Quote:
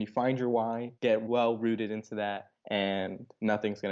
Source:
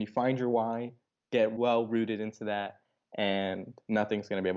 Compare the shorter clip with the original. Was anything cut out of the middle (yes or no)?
yes